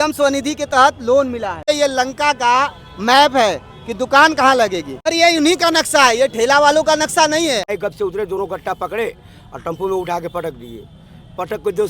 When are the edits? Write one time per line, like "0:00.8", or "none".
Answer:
0:01.7
0:05.1
0:07.7